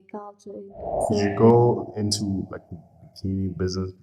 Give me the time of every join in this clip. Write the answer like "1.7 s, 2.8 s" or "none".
1.0 s

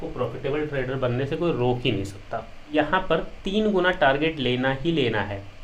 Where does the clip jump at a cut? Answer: 2.7 s

